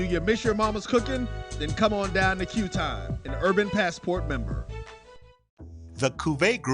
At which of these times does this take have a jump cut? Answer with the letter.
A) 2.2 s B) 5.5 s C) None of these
B